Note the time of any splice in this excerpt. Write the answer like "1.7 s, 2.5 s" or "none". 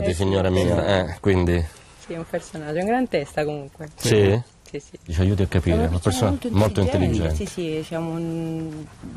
2.8 s